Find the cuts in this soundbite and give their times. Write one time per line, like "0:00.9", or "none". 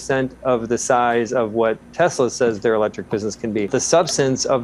0:03.7

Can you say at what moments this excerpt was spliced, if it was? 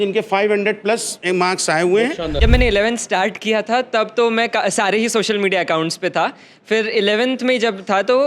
0:02.4

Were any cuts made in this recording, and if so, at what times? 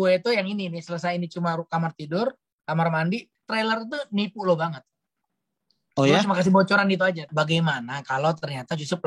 0:03.3
0:07.3

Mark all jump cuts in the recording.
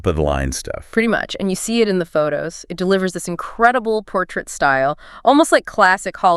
none

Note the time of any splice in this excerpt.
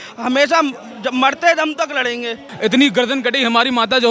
0:02.4

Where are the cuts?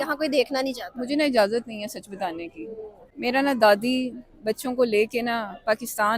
0:03.0

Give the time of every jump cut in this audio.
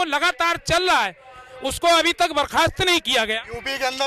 none

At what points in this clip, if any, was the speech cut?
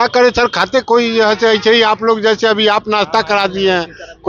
none

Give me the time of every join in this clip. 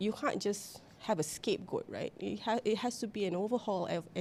none

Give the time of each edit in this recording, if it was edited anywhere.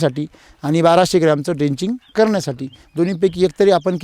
none

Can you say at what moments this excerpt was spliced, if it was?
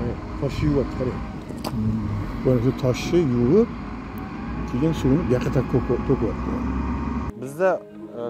0:07.3

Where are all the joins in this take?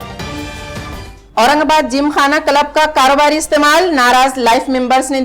0:00.9

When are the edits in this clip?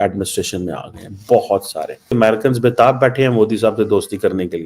0:01.9

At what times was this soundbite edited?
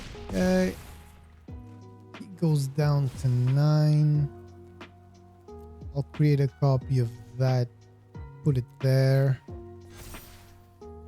0:00.9
0:02.2

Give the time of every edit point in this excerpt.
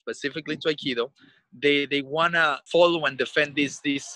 0:02.6

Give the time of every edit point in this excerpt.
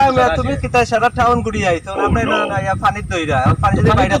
none

